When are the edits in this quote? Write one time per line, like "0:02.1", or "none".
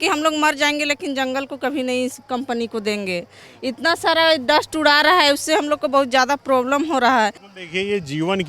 0:07.4

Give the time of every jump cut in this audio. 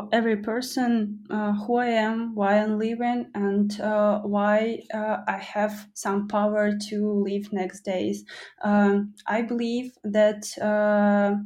none

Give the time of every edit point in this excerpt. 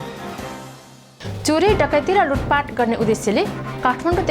0:01.0

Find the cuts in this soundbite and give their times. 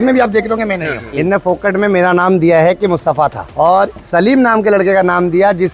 0:01.1
0:03.8

